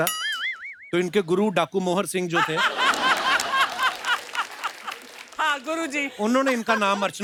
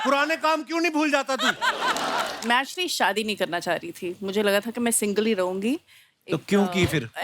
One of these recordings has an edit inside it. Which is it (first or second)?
second